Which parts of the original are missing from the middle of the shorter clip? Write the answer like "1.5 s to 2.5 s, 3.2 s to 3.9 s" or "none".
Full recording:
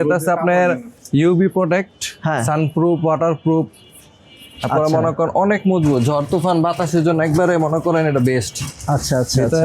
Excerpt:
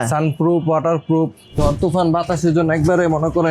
3.9 s to 6.1 s